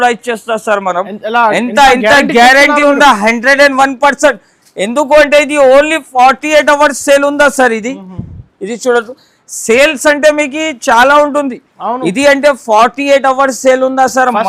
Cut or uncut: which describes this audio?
uncut